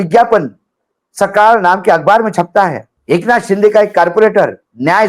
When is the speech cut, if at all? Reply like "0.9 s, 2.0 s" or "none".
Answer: 2.9 s